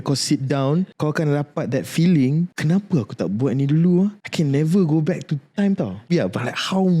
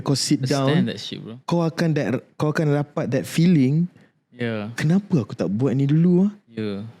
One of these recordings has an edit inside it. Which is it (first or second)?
first